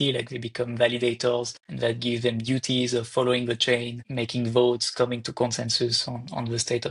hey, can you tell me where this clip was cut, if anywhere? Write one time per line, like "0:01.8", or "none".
0:01.6
0:04.0